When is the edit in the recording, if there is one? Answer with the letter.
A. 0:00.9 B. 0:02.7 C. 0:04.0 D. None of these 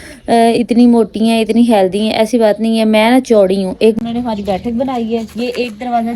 C